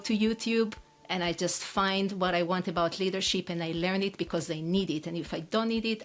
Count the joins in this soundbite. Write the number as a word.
zero